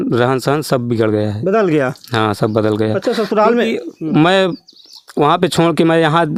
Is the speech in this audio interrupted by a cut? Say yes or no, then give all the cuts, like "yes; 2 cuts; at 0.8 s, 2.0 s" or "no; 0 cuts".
no; 0 cuts